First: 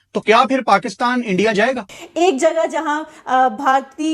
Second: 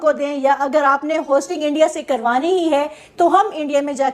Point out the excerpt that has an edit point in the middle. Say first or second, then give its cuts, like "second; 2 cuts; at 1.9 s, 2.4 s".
first; 1 cut; at 1.9 s